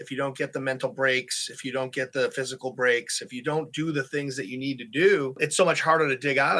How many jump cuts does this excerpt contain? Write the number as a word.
one